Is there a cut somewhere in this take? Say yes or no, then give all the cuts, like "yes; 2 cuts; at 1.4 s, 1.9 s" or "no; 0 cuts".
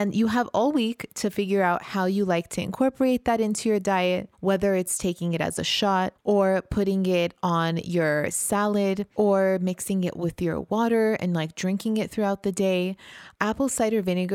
yes; 2 cuts; at 6.2 s, 9.1 s